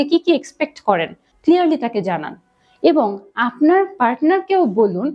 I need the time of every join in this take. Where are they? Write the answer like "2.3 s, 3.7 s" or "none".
1.3 s

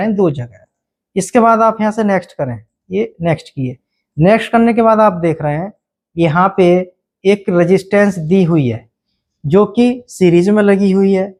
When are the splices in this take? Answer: none

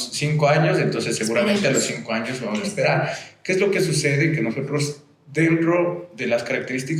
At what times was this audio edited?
none

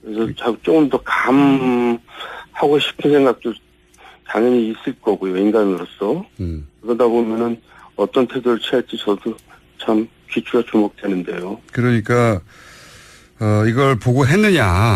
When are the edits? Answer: none

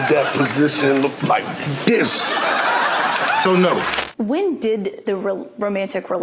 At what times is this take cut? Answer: 4.1 s

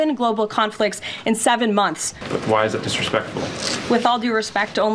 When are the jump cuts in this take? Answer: 2.2 s

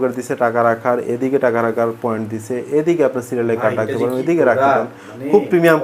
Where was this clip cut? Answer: none

